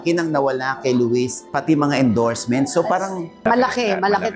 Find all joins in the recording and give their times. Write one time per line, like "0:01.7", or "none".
0:01.4
0:03.3